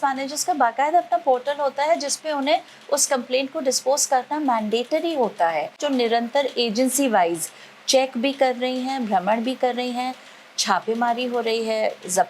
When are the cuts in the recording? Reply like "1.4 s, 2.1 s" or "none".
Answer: 5.8 s